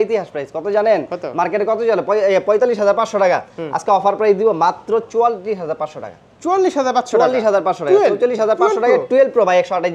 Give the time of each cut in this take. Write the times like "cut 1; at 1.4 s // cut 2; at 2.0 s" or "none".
none

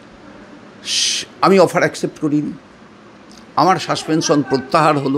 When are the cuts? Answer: none

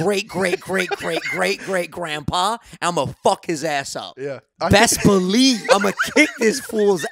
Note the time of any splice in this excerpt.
cut 1; at 4.4 s // cut 2; at 5.6 s

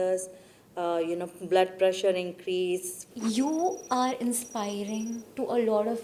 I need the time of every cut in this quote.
cut 1; at 3.0 s

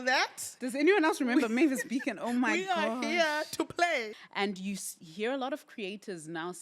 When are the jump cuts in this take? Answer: cut 1; at 4.2 s

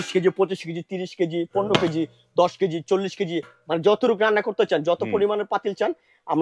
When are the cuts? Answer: none

